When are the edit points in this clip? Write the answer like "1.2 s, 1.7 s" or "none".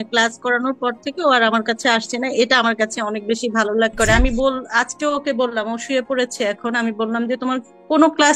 3.9 s